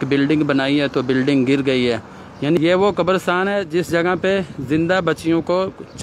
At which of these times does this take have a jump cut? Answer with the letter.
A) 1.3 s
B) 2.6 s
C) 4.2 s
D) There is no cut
B